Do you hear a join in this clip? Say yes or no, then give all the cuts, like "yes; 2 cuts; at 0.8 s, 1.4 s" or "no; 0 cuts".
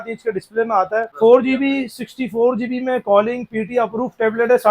yes; 1 cut; at 1.1 s